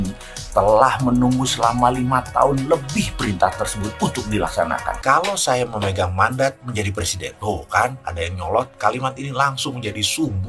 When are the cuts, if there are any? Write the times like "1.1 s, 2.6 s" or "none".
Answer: 5.0 s